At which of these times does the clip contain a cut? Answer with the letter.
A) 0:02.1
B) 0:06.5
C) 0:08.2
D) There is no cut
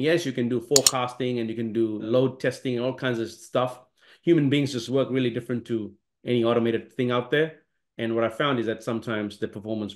A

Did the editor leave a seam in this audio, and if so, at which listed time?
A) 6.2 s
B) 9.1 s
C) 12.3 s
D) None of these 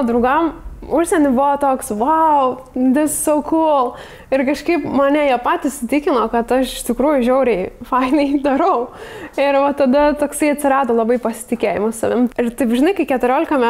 C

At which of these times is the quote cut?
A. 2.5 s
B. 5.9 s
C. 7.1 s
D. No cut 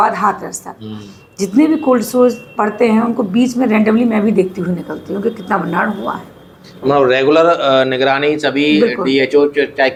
D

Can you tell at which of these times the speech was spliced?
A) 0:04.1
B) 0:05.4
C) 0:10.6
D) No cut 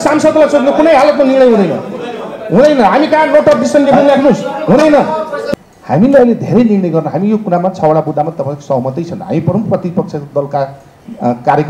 B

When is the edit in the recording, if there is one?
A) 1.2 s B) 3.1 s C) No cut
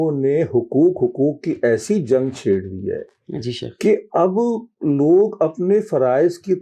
C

